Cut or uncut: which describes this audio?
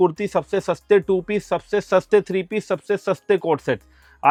uncut